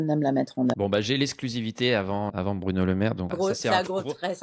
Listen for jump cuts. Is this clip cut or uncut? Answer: cut